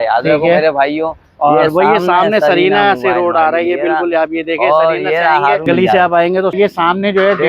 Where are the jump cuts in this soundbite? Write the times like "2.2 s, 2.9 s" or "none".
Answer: 5.6 s, 6.5 s